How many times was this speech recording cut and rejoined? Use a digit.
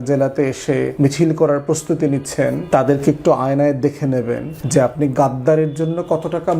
3